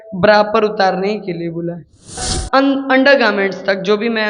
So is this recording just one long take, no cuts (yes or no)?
no